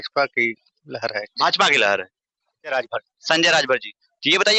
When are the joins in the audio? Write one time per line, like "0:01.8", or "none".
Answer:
0:02.7